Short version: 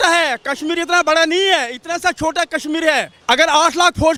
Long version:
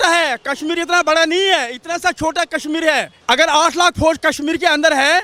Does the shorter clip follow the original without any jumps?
yes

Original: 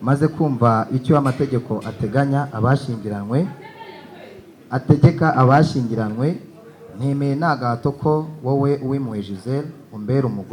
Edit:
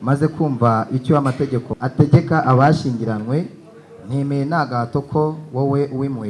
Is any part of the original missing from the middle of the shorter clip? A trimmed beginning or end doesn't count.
yes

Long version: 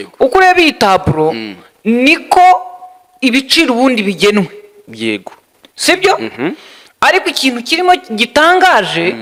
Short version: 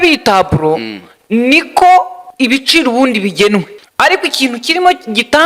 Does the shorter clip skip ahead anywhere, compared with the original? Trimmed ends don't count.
yes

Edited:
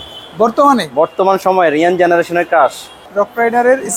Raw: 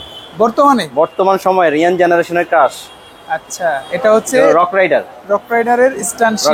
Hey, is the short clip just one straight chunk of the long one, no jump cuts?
no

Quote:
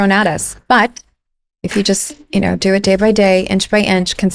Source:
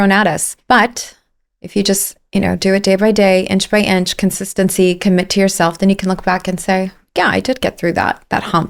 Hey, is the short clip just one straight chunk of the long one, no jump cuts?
yes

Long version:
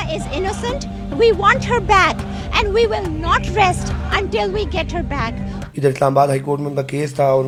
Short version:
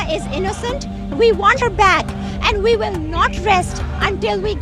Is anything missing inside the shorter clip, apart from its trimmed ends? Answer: yes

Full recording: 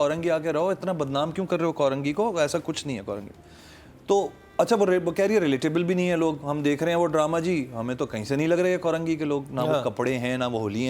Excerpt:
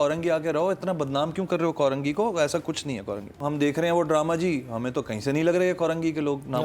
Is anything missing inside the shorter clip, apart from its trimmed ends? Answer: yes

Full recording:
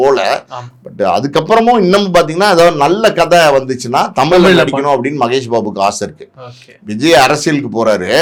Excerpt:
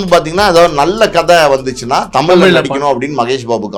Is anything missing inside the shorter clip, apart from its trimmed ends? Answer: no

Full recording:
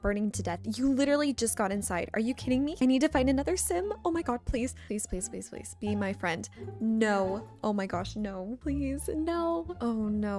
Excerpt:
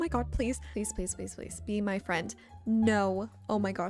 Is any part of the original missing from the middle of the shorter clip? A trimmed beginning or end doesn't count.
no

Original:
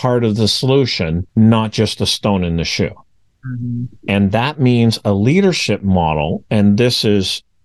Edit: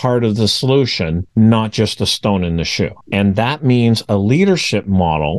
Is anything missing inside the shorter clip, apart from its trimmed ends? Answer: yes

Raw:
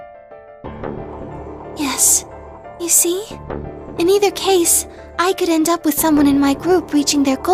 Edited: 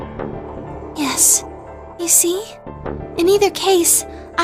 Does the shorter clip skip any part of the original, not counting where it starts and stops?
yes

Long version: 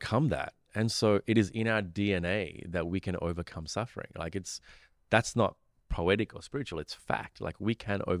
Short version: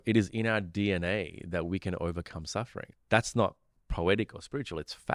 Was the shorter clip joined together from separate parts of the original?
yes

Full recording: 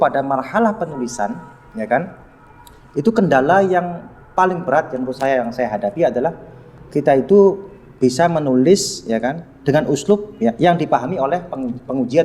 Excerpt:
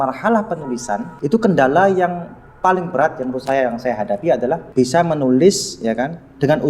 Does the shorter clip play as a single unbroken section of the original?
no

